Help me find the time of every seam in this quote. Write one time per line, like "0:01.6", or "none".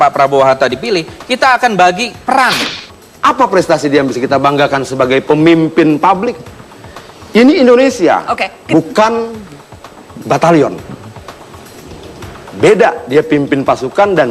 0:02.7